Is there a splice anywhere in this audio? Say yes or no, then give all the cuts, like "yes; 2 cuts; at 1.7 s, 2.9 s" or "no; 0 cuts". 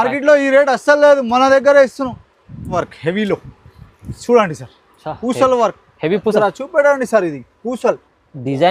yes; 1 cut; at 2.8 s